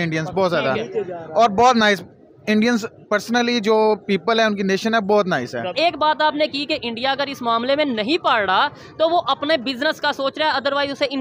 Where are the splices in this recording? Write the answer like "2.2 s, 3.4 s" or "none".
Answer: 5.7 s